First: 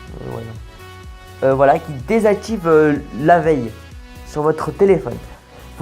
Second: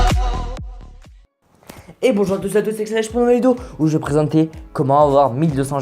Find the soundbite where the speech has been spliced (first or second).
first